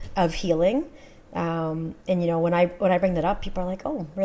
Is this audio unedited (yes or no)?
yes